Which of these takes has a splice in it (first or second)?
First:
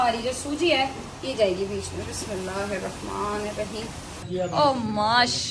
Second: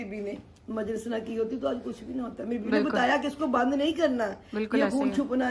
first